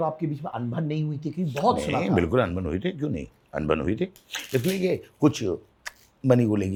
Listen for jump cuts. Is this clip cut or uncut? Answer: uncut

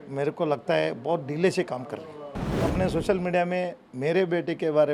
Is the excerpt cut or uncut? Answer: cut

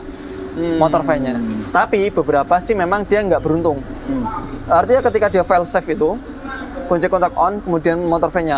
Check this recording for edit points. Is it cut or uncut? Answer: uncut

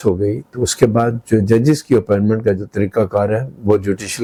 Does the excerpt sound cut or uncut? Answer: uncut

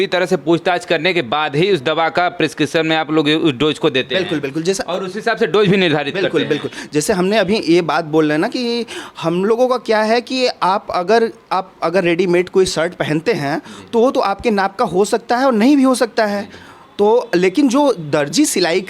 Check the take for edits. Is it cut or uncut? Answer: uncut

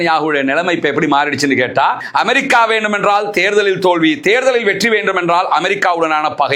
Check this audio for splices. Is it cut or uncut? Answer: cut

